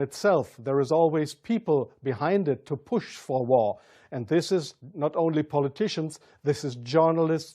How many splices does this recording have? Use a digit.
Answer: 1